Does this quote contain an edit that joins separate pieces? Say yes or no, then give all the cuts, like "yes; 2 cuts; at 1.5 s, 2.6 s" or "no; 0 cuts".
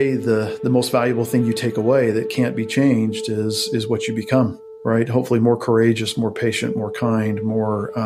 no; 0 cuts